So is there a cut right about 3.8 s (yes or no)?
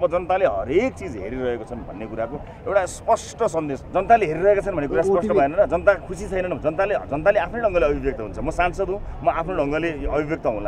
yes